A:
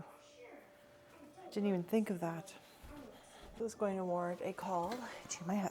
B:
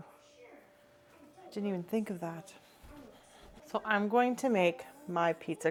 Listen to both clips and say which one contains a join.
A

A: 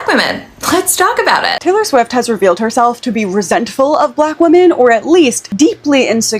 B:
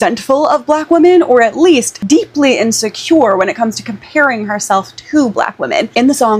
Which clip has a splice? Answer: A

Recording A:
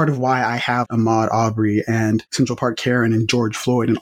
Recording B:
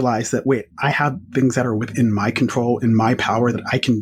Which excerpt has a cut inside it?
A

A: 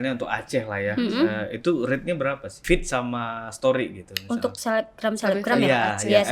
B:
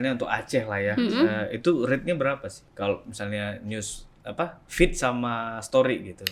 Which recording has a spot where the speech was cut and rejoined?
A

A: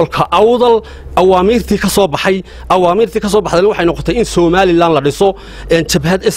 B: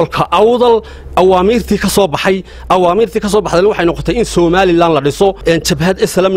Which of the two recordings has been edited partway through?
B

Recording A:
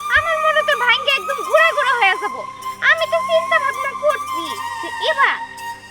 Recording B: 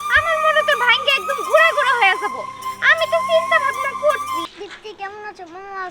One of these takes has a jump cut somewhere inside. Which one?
B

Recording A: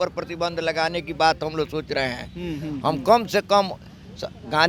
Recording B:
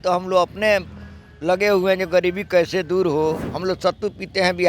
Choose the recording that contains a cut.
B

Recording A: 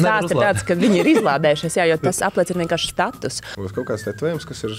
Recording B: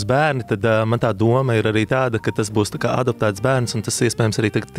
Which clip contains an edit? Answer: A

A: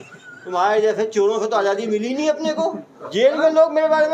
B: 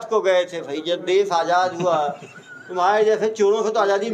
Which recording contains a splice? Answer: A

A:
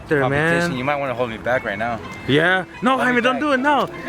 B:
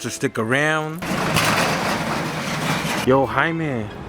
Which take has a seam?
B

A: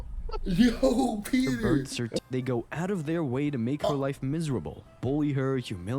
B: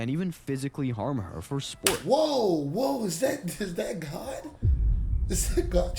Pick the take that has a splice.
A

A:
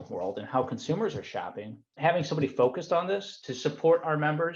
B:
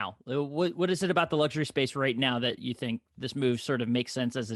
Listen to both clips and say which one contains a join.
A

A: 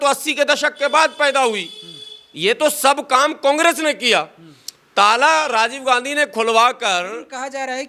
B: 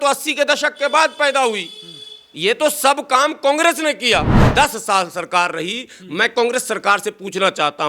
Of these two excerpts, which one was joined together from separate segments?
B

